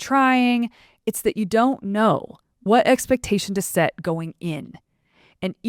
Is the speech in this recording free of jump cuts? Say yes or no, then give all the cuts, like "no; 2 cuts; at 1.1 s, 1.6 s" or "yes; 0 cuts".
yes; 0 cuts